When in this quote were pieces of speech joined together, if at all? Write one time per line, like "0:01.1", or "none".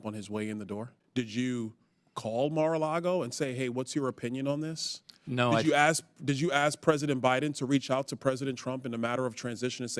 0:00.9

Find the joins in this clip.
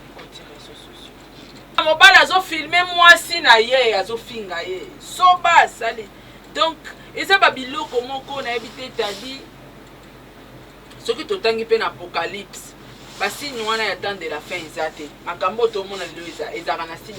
0:01.8

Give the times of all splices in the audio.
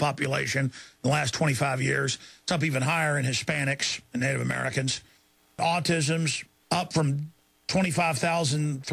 0:05.6

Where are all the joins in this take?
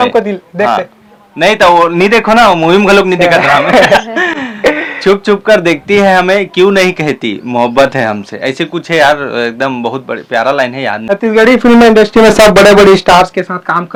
none

